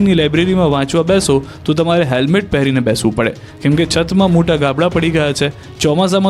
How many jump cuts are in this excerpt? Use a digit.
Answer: 0